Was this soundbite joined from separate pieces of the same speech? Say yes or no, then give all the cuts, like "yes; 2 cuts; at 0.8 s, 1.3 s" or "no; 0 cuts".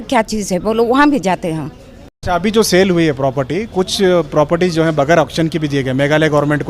yes; 1 cut; at 2.1 s